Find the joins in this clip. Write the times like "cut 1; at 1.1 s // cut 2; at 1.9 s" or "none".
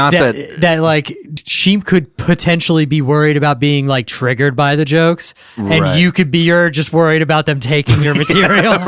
cut 1; at 1.2 s

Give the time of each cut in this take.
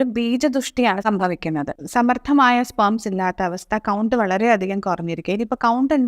cut 1; at 1.8 s

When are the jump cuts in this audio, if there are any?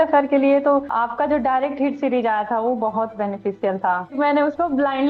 cut 1; at 0.9 s // cut 2; at 4.1 s

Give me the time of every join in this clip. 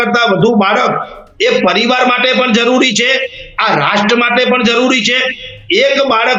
none

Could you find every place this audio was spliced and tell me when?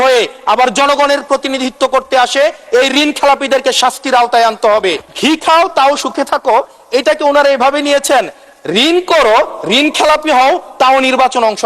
cut 1; at 5.1 s

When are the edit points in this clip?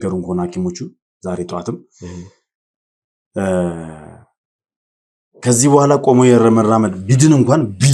none

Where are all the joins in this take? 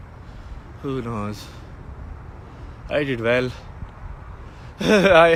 none

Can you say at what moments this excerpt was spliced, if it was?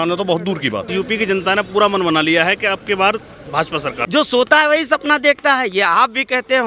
cut 1; at 0.9 s // cut 2; at 4.0 s

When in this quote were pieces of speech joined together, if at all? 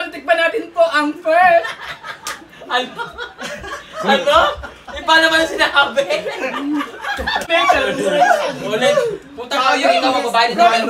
cut 1; at 7.5 s

